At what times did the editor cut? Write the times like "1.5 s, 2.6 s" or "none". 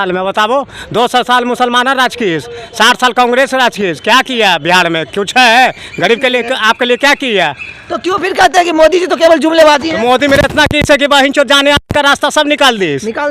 none